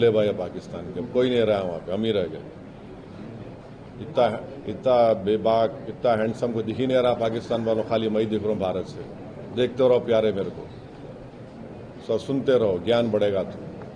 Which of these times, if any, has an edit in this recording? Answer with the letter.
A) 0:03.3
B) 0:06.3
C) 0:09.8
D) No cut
D